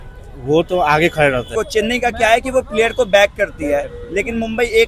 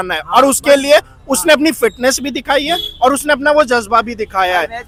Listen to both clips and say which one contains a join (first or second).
first